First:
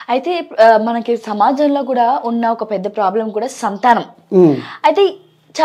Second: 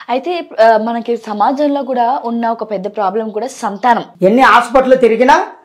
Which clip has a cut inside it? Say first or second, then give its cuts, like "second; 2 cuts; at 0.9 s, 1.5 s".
second; 1 cut; at 4.1 s